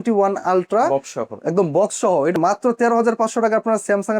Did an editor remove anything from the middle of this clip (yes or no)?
yes